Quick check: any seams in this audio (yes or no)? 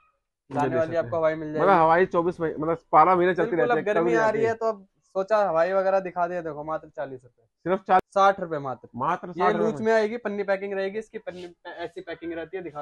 yes